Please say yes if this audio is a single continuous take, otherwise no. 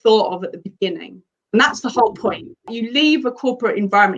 no